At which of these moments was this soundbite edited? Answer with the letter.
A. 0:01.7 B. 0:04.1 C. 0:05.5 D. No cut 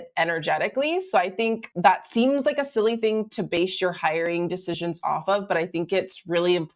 A